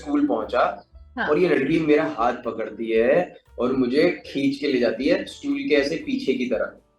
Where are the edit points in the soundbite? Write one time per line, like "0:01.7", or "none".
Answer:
none